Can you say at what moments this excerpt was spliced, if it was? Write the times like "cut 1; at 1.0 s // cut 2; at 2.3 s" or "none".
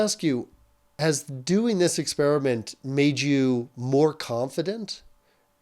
cut 1; at 0.9 s